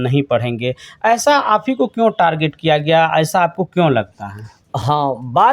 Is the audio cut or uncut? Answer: uncut